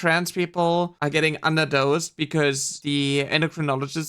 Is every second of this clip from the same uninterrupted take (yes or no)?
no